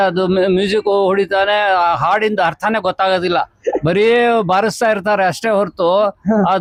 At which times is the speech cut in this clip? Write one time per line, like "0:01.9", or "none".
none